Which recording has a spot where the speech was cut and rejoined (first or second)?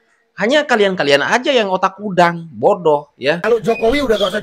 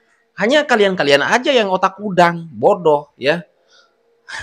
first